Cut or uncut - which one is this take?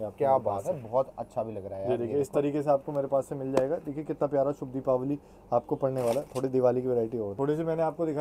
uncut